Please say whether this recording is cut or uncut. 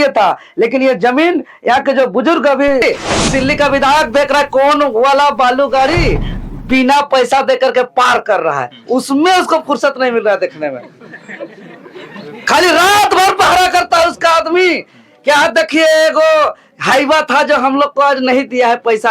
cut